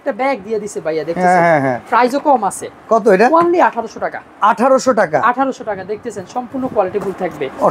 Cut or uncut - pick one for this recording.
uncut